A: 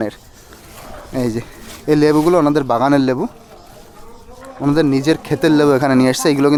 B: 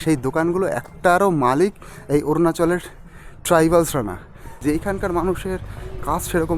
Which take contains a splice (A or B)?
B